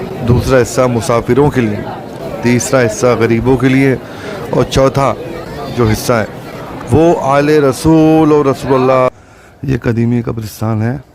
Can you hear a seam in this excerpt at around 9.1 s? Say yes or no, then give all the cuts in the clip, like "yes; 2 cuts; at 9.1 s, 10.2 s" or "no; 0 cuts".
yes; 1 cut; at 9.1 s